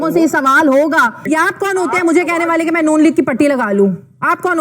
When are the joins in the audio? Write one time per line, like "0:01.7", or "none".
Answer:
0:01.2